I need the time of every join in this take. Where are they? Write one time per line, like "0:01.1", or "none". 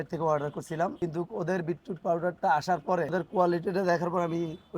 0:00.9
0:03.1